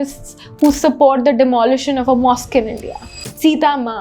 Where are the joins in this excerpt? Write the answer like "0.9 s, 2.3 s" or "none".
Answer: 2.9 s